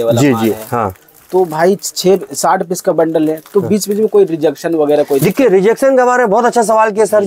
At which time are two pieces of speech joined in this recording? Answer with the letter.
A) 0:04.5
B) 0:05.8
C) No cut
C